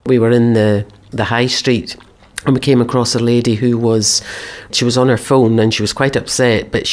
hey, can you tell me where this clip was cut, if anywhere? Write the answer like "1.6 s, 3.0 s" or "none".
4.7 s